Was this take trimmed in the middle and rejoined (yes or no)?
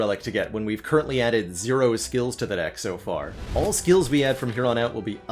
no